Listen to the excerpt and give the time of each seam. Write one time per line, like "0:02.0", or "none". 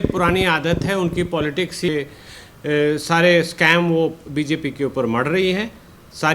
0:01.9